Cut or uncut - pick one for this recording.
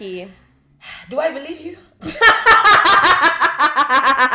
uncut